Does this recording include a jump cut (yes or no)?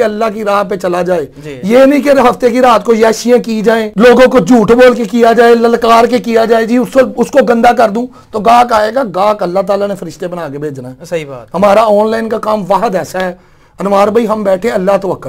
no